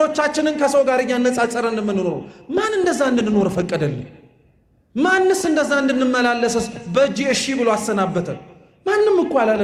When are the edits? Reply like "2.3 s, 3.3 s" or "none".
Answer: none